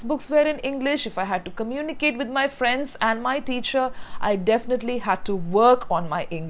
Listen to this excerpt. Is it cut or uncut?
uncut